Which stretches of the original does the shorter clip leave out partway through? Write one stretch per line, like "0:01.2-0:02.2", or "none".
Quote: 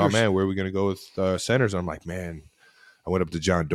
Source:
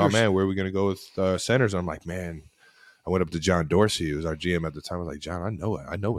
none